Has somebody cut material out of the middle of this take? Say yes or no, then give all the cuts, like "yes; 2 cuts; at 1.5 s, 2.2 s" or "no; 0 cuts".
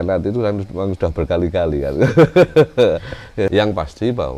yes; 1 cut; at 3.5 s